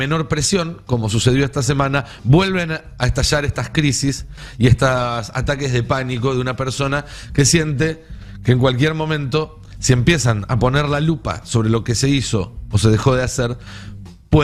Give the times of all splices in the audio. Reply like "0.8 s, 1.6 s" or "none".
none